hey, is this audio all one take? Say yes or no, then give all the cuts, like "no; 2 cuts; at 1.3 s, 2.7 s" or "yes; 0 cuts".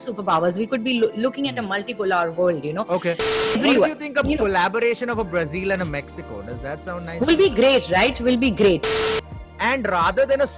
no; 2 cuts; at 3.3 s, 8.9 s